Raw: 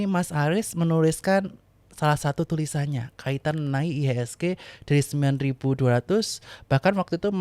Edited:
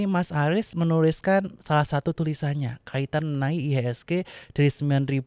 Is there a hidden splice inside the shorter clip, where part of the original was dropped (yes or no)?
yes